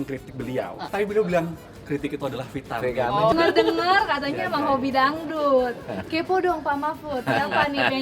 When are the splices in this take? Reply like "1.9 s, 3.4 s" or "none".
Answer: 0.8 s, 3.3 s